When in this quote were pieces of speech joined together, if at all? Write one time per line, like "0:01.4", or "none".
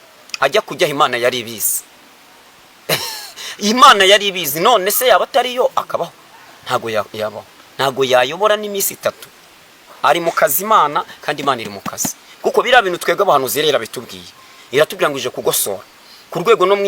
none